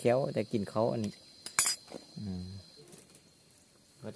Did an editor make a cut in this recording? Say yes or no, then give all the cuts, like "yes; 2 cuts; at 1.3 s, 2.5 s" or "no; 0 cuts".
yes; 1 cut; at 2.8 s